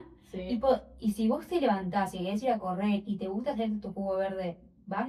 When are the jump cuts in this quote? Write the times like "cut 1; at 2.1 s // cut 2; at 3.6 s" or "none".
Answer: none